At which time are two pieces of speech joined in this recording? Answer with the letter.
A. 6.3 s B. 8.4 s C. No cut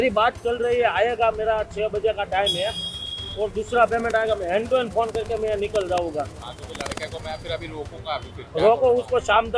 C